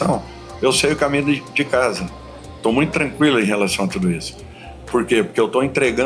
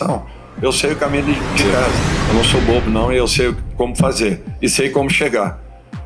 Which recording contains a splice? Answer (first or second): second